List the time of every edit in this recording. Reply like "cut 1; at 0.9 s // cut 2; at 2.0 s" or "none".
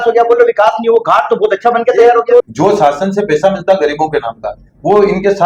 cut 1; at 2.5 s